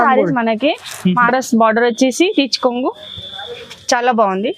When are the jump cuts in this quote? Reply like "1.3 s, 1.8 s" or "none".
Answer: 1.2 s